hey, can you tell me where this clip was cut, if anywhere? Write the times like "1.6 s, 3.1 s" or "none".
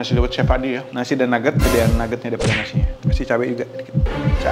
0.9 s

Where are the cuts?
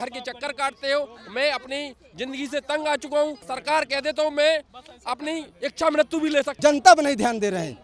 3.5 s, 6.5 s

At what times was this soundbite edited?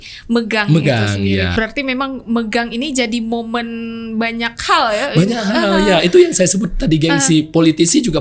1.5 s

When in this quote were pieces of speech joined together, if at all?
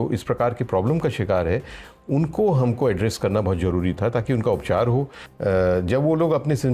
5.2 s

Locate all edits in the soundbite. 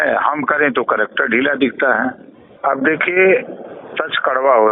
2.5 s

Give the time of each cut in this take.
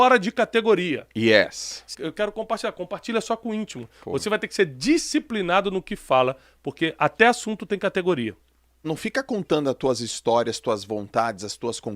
1.8 s, 8.9 s

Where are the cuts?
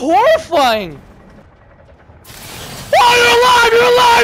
1.4 s

